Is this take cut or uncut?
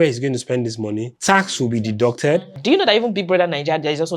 cut